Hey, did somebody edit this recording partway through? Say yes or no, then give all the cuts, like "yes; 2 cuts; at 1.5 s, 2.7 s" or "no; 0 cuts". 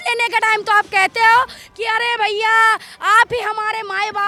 no; 0 cuts